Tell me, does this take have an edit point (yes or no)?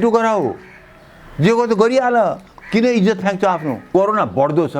yes